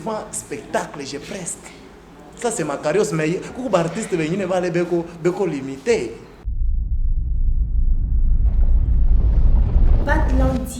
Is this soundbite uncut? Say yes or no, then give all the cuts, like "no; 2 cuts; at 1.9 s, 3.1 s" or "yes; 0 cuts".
no; 1 cut; at 6.4 s